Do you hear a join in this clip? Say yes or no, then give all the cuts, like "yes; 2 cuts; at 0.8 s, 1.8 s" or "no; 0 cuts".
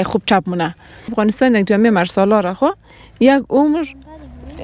yes; 1 cut; at 1.1 s